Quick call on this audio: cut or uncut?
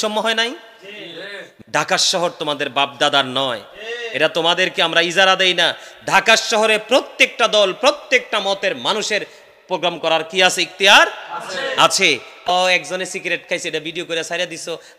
cut